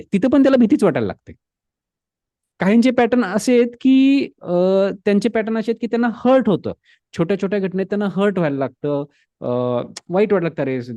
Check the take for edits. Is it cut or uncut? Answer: uncut